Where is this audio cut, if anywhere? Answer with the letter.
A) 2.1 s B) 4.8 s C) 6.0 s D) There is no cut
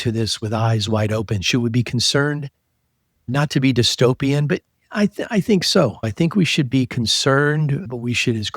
C